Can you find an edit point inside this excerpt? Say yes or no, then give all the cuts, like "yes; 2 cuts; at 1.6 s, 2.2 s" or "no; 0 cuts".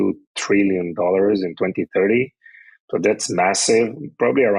no; 0 cuts